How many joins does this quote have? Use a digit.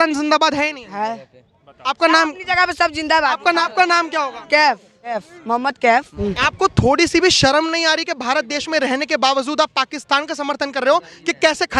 3